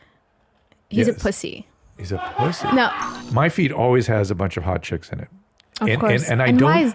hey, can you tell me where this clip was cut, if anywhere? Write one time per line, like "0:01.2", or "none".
0:03.1